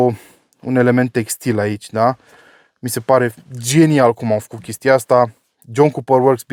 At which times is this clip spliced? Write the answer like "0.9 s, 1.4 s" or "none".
none